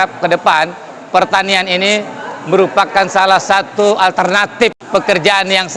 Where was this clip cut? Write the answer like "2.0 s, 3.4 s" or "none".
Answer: 4.8 s